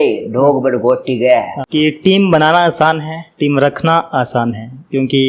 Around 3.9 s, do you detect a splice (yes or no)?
no